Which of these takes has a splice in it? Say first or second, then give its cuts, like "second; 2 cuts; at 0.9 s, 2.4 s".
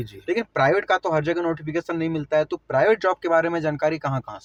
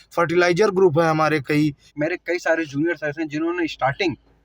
second; 1 cut; at 1.8 s